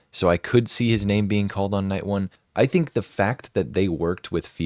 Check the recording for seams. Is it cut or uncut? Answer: cut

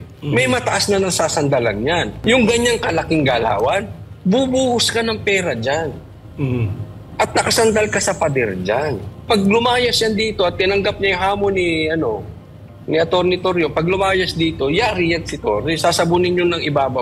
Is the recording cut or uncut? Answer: cut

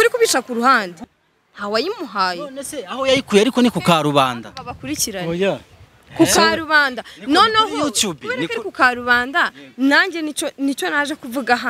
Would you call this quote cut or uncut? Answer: cut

